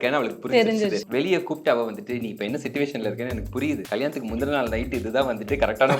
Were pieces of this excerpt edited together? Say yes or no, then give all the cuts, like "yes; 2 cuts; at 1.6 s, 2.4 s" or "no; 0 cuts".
yes; 2 cuts; at 1.0 s, 3.8 s